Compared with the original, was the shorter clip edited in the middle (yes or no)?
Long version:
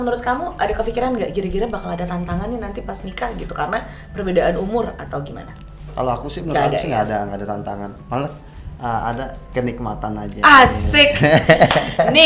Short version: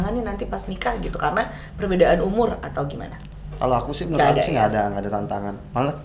no